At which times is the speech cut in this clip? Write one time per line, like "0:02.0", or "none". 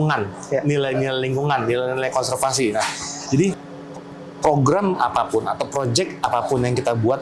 none